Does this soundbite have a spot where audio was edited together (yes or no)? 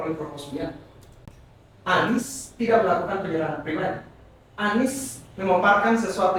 no